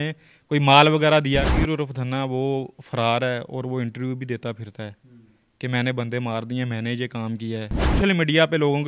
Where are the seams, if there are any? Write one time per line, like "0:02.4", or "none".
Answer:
0:01.4
0:08.0

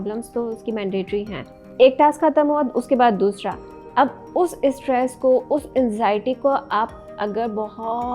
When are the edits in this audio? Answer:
0:01.4

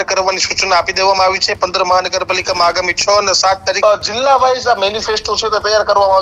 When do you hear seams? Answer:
0:03.8

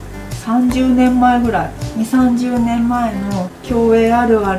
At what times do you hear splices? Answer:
0:01.8
0:03.5

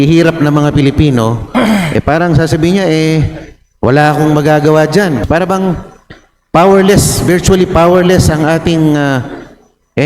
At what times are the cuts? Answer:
0:05.2

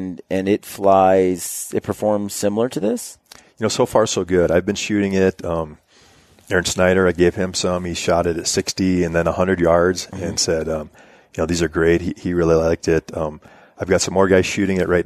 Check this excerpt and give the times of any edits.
none

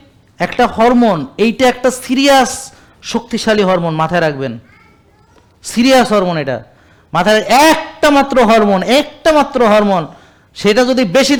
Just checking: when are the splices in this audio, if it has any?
none

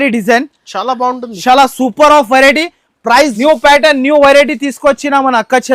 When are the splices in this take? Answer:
0:03.3

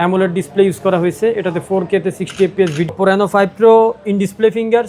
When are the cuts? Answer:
0:02.9

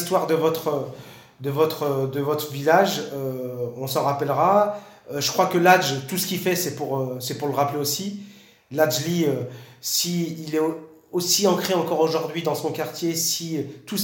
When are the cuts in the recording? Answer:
none

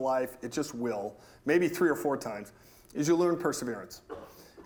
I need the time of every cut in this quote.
none

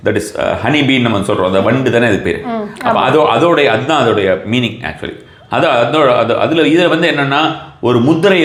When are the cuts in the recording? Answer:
none

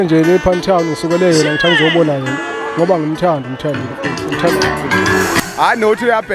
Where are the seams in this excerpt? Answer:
0:05.4

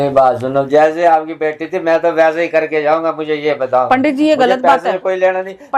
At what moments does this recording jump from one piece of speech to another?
none

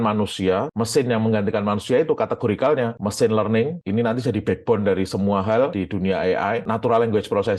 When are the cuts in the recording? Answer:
0:05.8

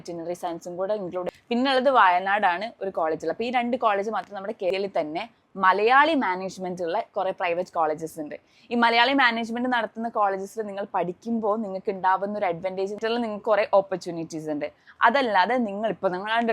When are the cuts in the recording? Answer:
0:01.3
0:04.7
0:13.0

